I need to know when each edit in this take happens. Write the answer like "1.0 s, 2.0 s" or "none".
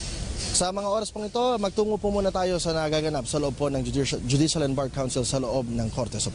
5.1 s